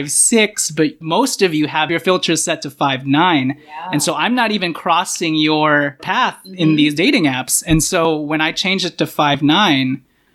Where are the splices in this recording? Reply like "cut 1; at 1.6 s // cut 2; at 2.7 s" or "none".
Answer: cut 1; at 1.9 s